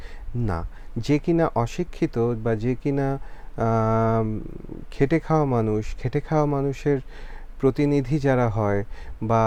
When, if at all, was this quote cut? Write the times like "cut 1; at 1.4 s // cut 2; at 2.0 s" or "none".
none